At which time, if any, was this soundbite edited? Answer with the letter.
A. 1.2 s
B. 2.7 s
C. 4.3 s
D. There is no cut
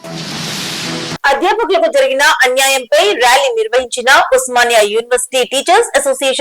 A